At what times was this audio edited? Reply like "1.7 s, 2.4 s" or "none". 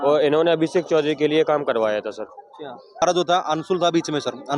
3.0 s